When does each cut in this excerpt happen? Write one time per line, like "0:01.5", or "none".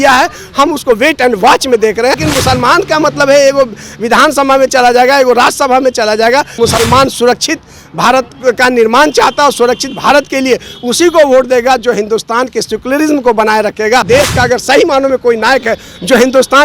0:02.2
0:06.6
0:14.1